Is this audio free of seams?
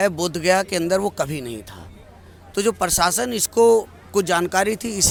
yes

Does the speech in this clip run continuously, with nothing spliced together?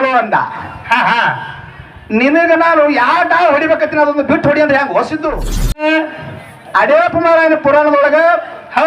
no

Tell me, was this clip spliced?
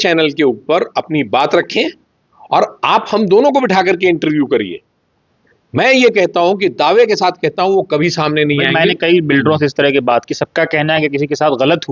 no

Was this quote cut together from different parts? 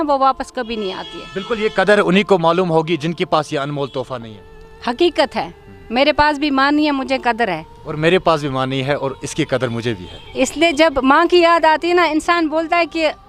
no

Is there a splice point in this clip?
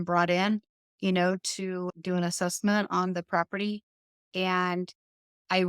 yes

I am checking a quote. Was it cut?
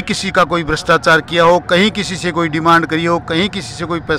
no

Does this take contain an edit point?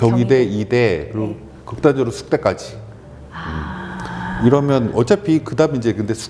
no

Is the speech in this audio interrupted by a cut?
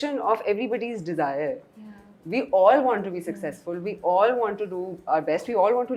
no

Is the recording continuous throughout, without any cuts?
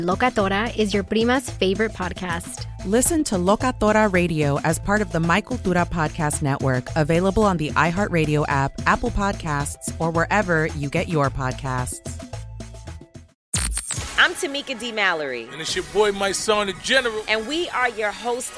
no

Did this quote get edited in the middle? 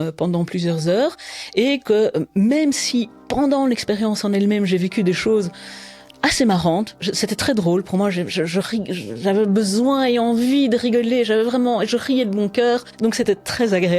yes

